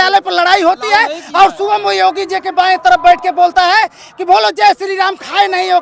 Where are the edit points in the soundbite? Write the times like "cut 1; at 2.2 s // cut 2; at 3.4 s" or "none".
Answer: none